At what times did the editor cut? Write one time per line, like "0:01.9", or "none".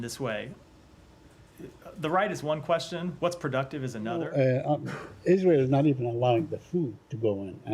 0:04.3